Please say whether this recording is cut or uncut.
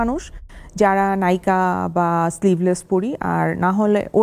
uncut